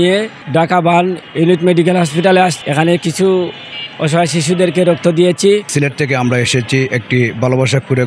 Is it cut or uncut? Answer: cut